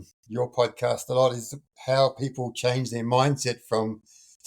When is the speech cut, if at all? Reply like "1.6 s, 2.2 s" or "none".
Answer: none